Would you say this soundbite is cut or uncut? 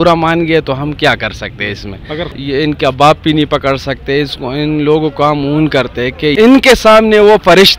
cut